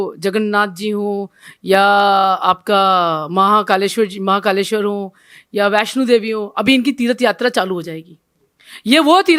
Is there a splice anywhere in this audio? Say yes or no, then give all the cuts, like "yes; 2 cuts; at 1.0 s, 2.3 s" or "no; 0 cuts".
no; 0 cuts